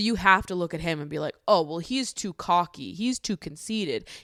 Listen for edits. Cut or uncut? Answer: uncut